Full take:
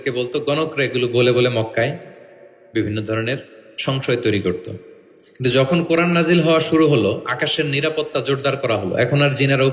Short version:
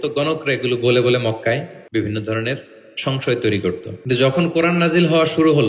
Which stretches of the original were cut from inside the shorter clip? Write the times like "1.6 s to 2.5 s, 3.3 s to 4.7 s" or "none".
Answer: 2.1 s to 2.6 s, 4.7 s to 5.2 s